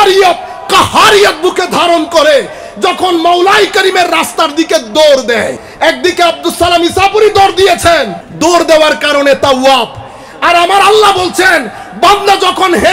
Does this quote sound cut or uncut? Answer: cut